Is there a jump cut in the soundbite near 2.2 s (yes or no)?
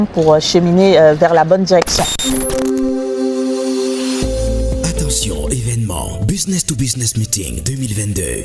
yes